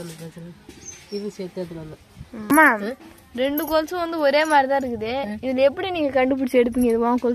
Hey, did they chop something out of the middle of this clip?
yes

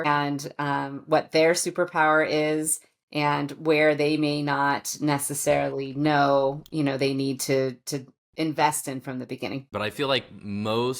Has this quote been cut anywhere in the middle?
yes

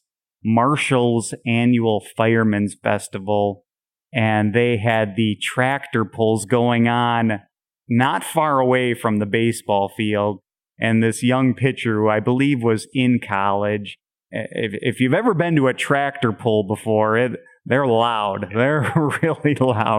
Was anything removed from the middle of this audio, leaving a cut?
no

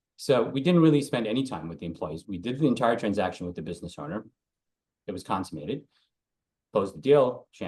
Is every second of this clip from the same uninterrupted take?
yes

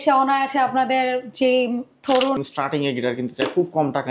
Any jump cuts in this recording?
yes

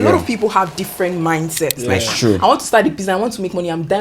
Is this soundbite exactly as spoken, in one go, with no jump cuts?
no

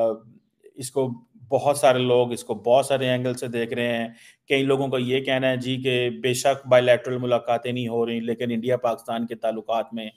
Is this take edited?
no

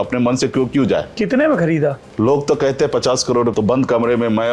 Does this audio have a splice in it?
yes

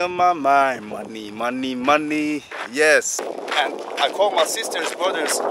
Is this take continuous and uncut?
no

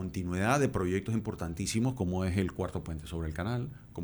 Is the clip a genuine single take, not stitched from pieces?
yes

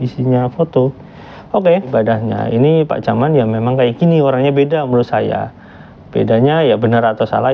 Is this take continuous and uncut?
no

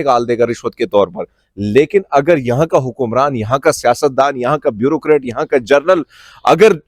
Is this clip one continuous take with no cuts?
yes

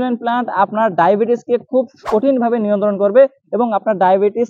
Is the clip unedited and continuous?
yes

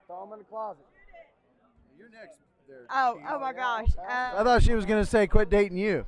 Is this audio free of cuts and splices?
yes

